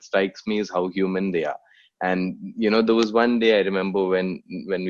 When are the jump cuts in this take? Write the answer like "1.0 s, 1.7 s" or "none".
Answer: none